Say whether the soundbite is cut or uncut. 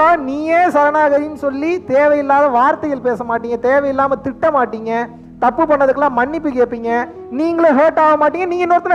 uncut